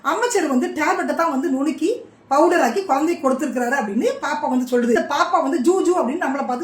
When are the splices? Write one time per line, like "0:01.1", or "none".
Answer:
0:05.0

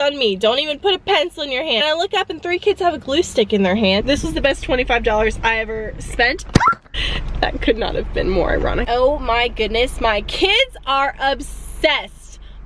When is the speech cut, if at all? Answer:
0:01.8
0:04.0
0:06.8
0:08.8

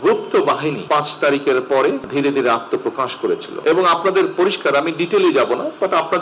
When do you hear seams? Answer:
0:00.8
0:02.0
0:03.5

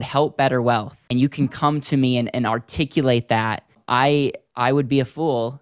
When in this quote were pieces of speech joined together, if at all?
0:01.0
0:03.8

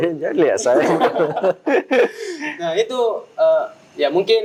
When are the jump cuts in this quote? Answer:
none

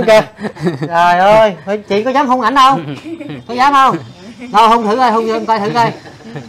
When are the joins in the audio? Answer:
none

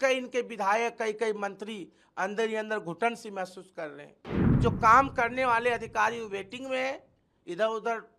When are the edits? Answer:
0:04.6

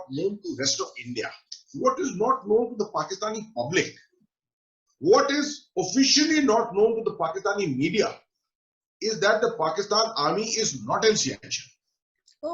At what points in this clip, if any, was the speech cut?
none

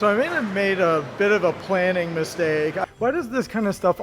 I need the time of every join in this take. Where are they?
0:02.8

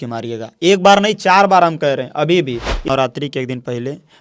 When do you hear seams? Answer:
0:02.9

